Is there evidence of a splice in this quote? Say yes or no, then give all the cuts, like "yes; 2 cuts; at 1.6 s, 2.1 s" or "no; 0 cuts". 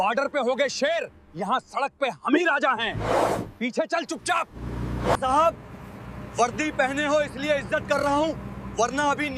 no; 0 cuts